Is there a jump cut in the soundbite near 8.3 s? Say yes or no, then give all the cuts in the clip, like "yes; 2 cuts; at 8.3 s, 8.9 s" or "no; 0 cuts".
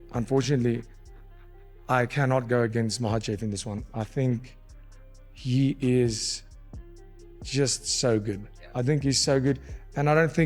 no; 0 cuts